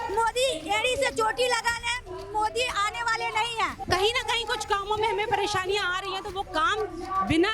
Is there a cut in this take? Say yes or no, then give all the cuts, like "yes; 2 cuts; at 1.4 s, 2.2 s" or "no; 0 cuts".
yes; 1 cut; at 3.8 s